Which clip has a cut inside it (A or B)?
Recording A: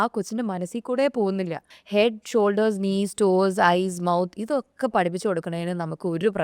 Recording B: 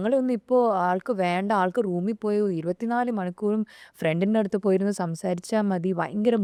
A